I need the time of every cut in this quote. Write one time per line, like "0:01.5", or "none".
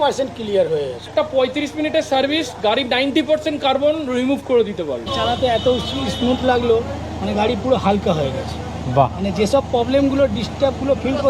0:01.1
0:05.1